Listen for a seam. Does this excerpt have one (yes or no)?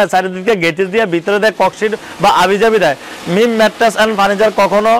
no